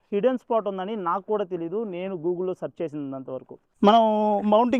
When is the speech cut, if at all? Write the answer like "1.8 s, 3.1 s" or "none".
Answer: 3.8 s